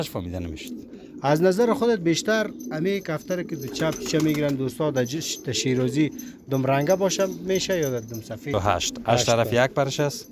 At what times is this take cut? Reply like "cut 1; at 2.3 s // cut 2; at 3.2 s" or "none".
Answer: cut 1; at 8.5 s